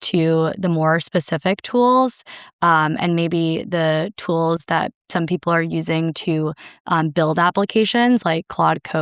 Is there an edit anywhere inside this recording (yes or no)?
no